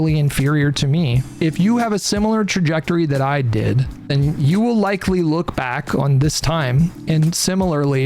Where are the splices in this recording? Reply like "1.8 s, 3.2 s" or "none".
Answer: 1.2 s, 3.9 s

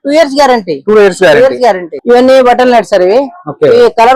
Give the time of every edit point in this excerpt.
1.9 s

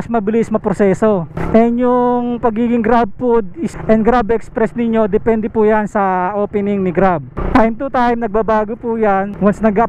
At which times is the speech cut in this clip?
none

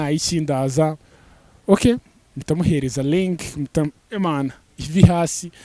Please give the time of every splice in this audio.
none

